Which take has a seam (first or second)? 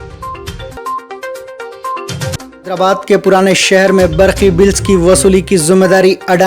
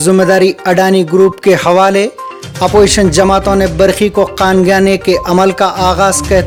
first